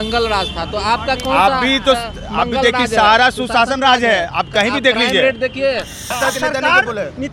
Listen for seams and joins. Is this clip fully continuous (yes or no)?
no